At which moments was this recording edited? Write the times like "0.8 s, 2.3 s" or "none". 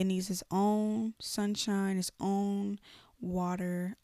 none